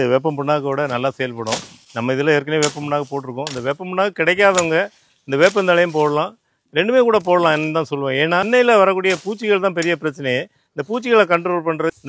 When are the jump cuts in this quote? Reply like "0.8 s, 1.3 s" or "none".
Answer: none